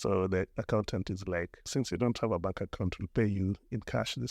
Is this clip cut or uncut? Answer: cut